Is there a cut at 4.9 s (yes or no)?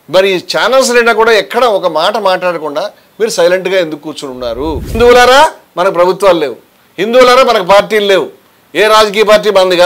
yes